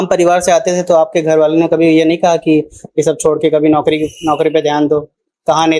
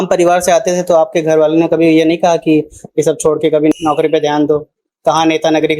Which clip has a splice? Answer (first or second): second